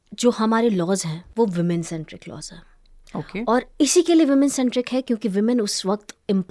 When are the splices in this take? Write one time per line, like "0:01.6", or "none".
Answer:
0:01.2